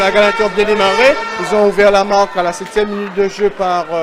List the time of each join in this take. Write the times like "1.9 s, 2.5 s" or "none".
none